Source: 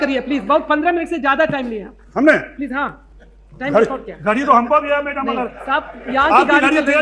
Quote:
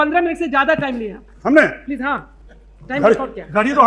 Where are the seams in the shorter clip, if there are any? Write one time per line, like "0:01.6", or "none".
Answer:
none